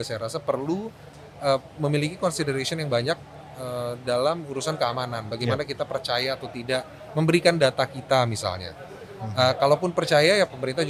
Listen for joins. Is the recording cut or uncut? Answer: uncut